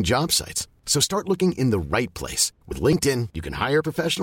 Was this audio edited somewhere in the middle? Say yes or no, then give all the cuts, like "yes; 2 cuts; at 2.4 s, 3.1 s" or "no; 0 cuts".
no; 0 cuts